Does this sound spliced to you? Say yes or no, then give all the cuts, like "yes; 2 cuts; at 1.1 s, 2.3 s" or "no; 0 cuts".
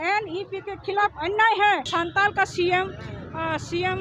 yes; 1 cut; at 1.9 s